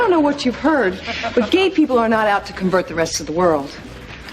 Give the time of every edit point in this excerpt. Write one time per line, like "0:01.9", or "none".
none